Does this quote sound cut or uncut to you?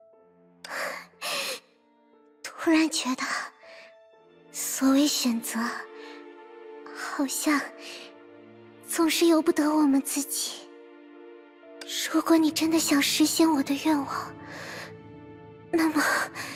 uncut